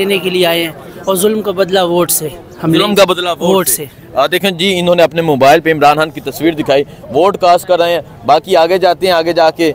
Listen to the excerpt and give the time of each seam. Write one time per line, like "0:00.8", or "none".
none